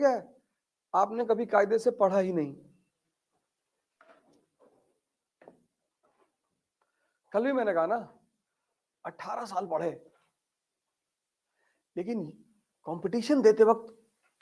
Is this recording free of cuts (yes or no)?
no